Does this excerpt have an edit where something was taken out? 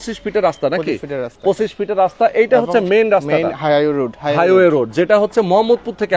no; 0 cuts

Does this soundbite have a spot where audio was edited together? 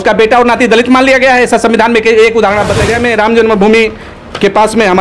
yes; 1 cut; at 2.9 s

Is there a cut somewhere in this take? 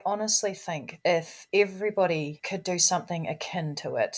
yes; 2 cuts; at 1.0 s, 2.4 s

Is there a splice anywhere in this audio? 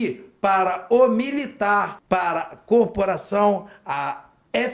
yes; 1 cut; at 1.9 s

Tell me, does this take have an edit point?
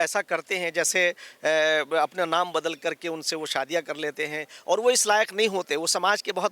no; 0 cuts

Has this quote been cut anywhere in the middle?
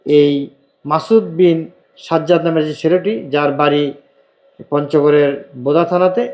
no; 0 cuts

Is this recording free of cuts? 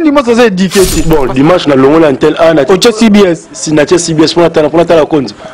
no; 1 cut; at 1.0 s

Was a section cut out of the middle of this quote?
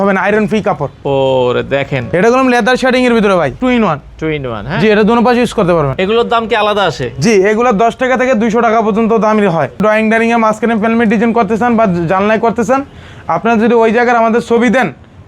yes; 4 cuts; at 2.1 s, 3.6 s, 5.9 s, 9.8 s

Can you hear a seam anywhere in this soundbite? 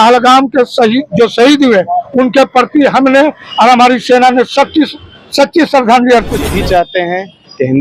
yes; 1 cut; at 6.5 s

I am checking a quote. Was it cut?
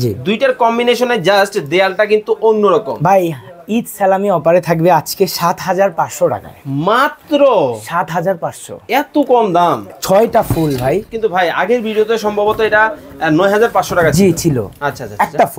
no; 0 cuts

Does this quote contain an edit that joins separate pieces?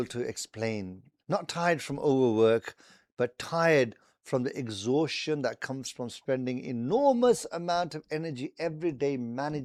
no; 0 cuts

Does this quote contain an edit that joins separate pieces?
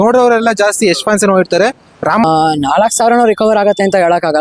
yes; 1 cut; at 2.2 s

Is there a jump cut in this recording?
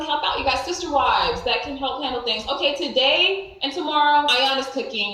no; 0 cuts

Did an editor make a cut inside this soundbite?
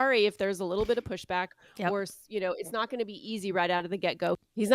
no; 0 cuts

